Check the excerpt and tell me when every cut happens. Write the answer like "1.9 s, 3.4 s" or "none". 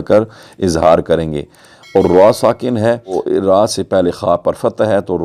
3.2 s